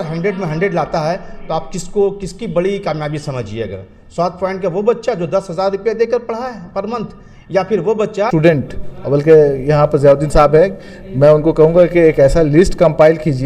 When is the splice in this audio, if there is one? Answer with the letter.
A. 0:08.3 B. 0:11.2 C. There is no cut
A